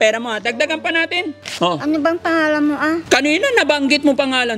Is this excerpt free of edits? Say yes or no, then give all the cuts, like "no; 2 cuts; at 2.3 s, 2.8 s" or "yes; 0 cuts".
no; 2 cuts; at 1.4 s, 3.0 s